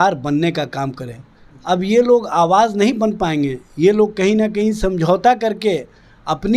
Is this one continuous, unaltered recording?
yes; 0 cuts

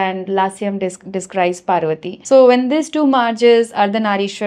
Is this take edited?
yes; 1 cut; at 2.1 s

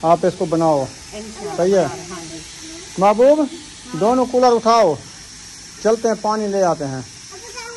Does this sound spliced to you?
no; 0 cuts

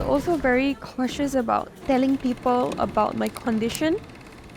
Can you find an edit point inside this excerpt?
yes; 1 cut; at 1.7 s

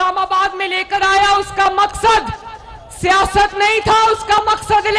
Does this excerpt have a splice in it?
no; 0 cuts

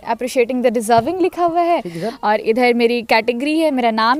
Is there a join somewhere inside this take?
no; 0 cuts

